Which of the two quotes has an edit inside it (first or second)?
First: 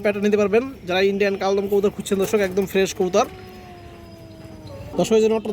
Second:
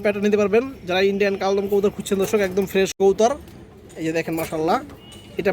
second